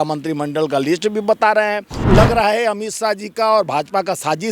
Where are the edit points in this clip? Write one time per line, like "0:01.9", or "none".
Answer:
0:01.9